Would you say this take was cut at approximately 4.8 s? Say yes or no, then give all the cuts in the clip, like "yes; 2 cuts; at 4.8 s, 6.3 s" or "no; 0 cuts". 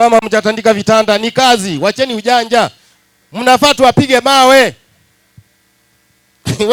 no; 0 cuts